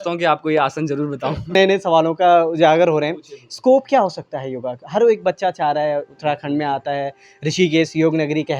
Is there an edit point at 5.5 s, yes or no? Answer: no